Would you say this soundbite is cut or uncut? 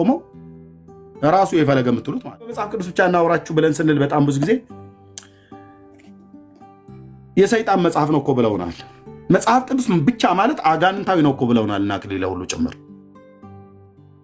cut